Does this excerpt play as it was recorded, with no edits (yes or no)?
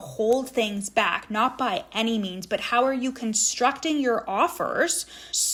yes